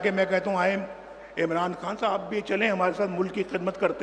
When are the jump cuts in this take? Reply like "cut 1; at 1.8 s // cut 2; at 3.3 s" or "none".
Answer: none